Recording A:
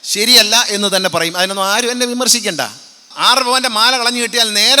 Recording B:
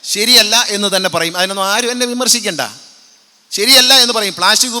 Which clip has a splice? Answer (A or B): A